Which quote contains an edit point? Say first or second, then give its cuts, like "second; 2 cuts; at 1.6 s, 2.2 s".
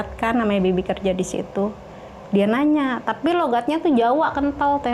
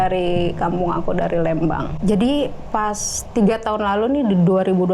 second; 1 cut; at 1.9 s